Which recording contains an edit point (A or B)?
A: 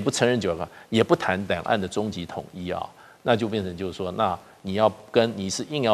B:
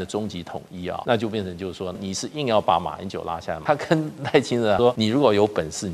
B